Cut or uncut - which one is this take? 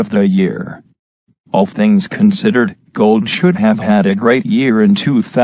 cut